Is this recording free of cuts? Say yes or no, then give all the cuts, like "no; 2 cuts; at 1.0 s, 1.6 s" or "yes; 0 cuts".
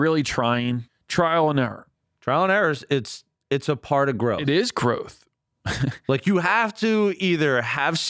no; 1 cut; at 0.9 s